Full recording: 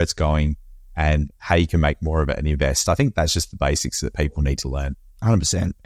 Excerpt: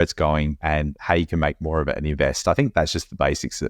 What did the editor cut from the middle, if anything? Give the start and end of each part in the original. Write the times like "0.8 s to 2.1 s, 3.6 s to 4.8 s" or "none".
0.9 s to 1.3 s

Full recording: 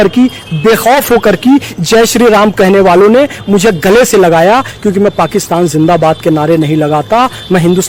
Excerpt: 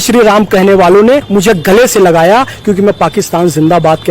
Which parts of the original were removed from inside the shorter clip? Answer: 3.3 s to 3.4 s

